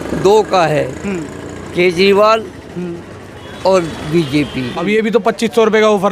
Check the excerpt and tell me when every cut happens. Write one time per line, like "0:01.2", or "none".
0:04.8